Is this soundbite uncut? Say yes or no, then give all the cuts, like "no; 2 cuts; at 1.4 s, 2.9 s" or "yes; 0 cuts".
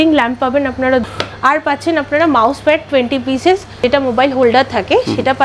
no; 2 cuts; at 1.0 s, 3.8 s